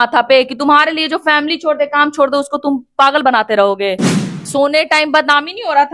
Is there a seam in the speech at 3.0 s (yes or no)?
no